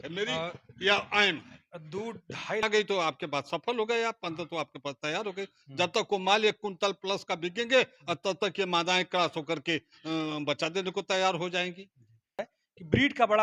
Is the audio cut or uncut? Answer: cut